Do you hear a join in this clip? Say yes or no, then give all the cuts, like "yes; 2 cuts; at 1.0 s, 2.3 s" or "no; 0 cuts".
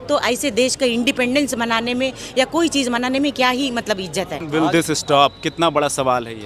yes; 1 cut; at 4.4 s